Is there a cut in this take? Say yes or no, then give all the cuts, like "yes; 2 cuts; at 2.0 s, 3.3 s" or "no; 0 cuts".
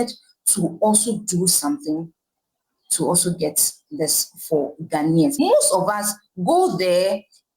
yes; 1 cut; at 5.3 s